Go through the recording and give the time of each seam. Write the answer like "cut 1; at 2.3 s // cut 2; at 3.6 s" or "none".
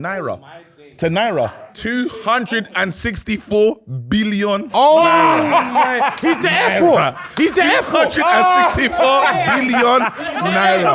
none